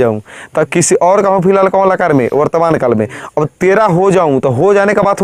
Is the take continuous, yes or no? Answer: yes